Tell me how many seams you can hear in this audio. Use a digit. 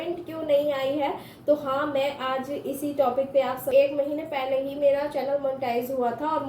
1